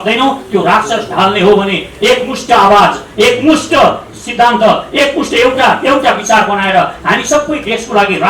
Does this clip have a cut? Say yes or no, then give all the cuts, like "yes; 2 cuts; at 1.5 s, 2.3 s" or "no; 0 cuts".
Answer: no; 0 cuts